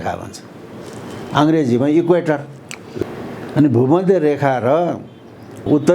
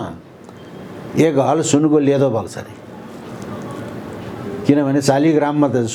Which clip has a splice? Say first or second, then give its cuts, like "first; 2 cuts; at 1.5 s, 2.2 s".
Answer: first; 1 cut; at 3.0 s